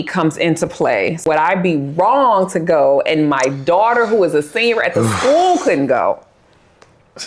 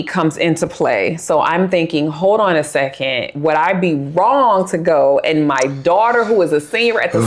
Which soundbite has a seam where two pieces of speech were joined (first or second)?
first